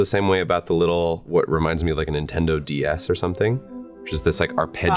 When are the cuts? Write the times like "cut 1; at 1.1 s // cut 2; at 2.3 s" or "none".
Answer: cut 1; at 1.2 s